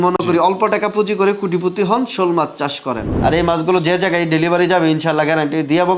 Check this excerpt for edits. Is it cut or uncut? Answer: cut